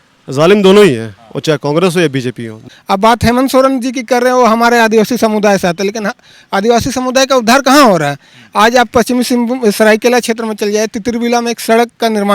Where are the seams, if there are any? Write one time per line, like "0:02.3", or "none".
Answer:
0:02.6